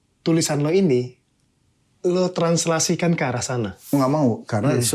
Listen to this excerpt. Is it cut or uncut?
cut